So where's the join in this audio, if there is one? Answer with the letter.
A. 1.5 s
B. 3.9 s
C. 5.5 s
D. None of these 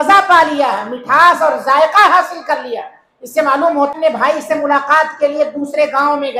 B